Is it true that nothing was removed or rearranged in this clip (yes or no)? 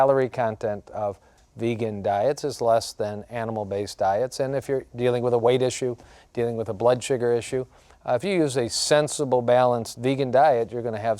no